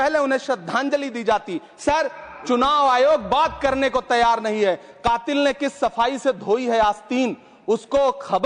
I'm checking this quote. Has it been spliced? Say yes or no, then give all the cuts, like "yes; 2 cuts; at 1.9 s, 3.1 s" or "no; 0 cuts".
no; 0 cuts